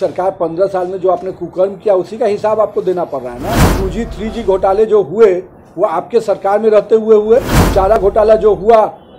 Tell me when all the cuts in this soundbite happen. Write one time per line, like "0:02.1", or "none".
0:03.7
0:08.0